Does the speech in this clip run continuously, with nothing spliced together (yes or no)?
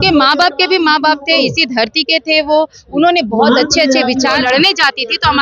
no